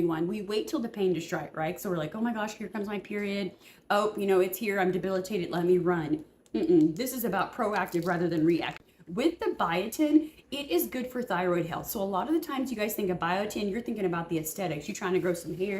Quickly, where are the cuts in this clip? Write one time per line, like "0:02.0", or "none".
0:08.8